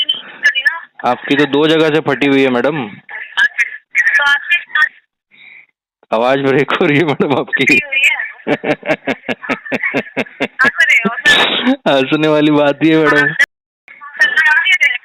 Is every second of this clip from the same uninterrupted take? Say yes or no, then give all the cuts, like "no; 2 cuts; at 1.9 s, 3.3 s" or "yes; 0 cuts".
yes; 0 cuts